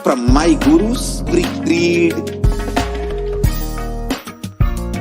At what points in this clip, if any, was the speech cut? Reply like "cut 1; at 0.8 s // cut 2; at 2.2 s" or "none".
cut 1; at 1.3 s